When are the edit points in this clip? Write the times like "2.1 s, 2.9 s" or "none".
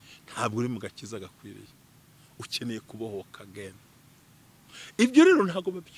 none